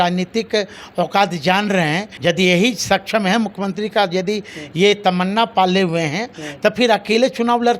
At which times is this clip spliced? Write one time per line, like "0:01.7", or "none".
0:02.1